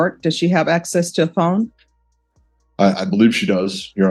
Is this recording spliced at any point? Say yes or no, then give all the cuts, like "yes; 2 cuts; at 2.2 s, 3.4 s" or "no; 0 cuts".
no; 0 cuts